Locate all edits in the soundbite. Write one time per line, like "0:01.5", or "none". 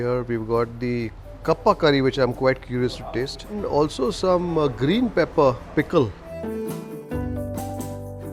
none

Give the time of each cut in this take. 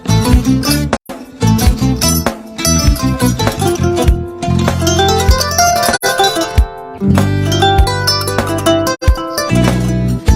none

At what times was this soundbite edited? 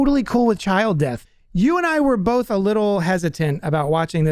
0:01.2

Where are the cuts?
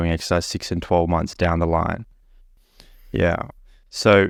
none

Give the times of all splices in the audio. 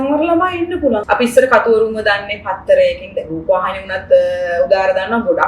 0:01.0

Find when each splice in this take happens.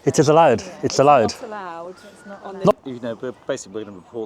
0:02.7

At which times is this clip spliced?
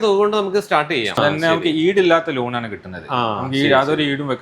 0:01.2

